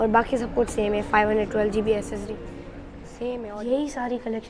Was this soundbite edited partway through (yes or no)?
yes